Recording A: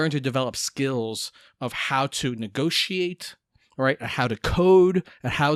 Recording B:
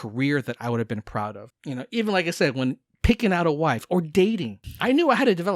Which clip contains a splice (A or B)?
B